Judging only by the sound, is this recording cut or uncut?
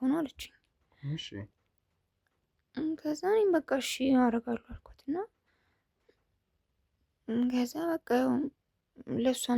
uncut